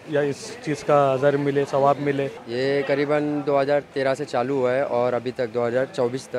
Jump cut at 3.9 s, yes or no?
no